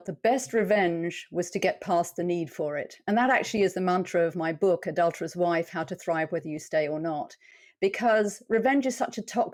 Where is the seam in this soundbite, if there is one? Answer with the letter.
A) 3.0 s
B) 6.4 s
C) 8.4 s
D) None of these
D